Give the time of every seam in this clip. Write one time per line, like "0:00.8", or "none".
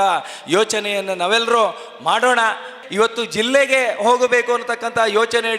0:02.8